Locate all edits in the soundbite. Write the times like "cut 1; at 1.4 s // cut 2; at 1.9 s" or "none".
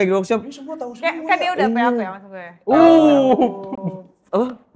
none